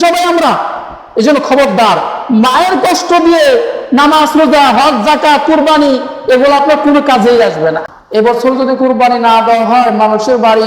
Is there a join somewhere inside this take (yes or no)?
yes